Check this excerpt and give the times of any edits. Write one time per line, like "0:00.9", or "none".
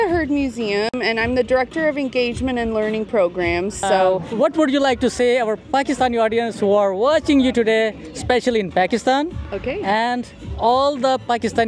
0:04.3